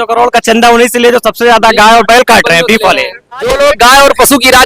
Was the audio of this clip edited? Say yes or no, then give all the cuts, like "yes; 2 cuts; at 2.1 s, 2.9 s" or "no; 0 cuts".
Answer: yes; 1 cut; at 3.5 s